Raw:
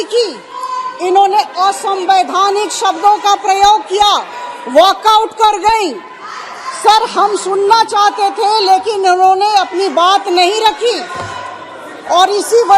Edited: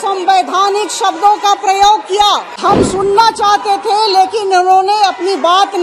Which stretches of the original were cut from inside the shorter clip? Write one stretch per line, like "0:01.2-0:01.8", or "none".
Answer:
0:04.4-0:07.1